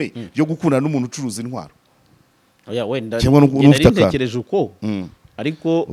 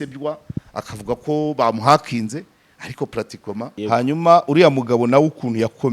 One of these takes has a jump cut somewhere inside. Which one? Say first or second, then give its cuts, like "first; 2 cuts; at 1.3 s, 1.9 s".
second; 1 cut; at 3.7 s